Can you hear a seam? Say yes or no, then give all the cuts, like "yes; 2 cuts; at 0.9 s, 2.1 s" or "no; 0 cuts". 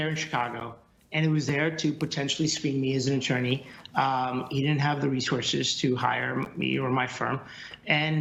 no; 0 cuts